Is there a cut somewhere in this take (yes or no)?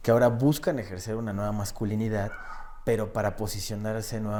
no